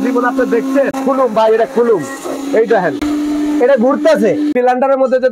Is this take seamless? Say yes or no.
no